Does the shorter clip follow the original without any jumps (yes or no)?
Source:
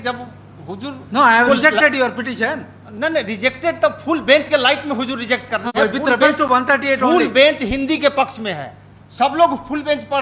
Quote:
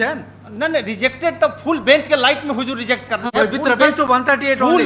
yes